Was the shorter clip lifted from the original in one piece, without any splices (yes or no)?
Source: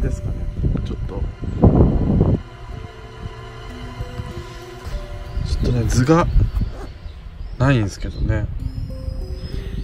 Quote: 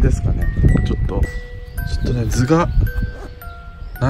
no